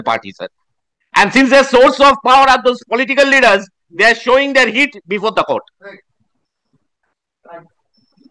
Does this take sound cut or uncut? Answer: uncut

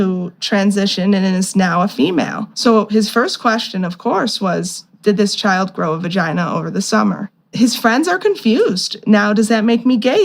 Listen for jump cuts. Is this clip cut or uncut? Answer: cut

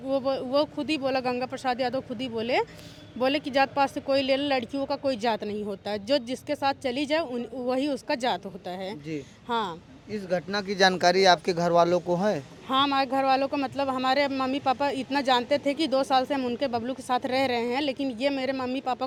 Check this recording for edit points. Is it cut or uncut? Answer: uncut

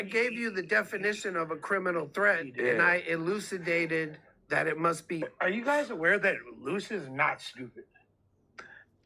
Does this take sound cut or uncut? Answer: cut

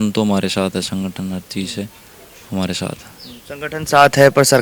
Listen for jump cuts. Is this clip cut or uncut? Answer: uncut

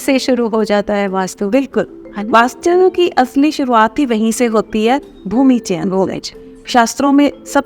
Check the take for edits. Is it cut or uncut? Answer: uncut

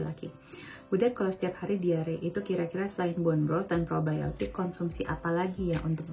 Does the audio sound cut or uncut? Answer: uncut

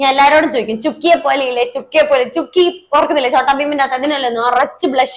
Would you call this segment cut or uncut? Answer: uncut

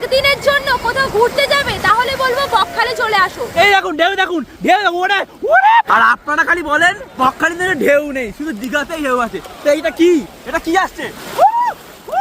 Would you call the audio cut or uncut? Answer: cut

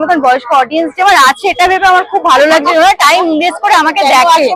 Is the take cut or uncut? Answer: uncut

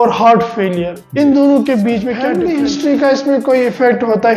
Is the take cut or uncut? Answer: cut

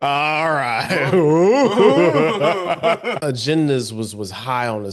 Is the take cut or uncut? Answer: cut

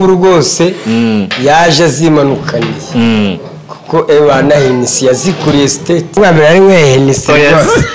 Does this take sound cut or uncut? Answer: cut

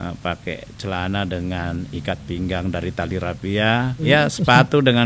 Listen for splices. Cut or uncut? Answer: cut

